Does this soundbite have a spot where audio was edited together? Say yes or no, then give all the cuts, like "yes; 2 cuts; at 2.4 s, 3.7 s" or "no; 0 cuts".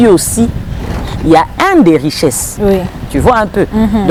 no; 0 cuts